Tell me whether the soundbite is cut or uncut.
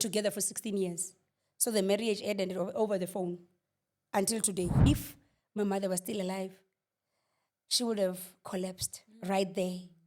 cut